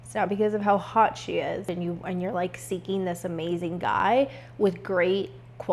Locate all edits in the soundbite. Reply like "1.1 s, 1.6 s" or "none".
1.7 s